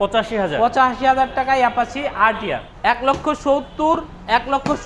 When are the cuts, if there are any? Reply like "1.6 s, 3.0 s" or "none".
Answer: 2.7 s